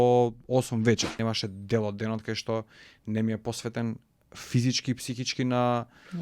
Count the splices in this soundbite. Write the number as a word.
one